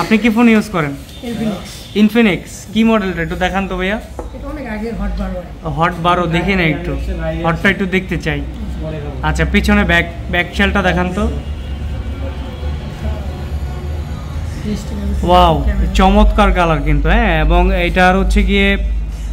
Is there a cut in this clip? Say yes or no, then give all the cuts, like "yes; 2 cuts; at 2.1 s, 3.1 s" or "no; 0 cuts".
no; 0 cuts